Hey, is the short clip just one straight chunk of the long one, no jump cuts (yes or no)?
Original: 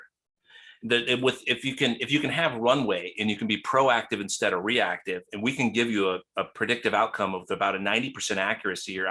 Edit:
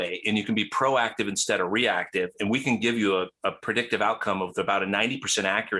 yes